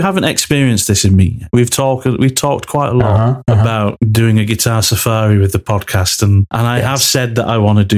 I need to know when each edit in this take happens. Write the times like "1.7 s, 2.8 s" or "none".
none